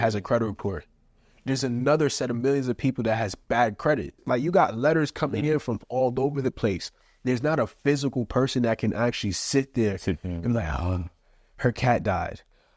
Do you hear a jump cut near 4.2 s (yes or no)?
yes